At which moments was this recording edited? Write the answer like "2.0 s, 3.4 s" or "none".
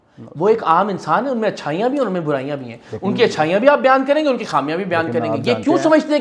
none